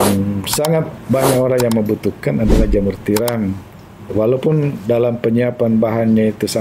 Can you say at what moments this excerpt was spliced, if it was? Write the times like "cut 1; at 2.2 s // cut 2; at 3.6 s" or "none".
cut 1; at 4.1 s